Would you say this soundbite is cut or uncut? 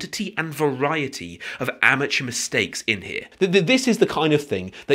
cut